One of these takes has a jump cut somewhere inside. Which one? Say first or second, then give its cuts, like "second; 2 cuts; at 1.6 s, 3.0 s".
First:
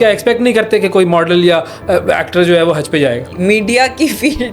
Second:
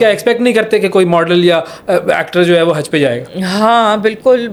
first; 1 cut; at 3.3 s